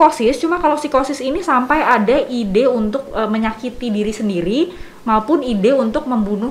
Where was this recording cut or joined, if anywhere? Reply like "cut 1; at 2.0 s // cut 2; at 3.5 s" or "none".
none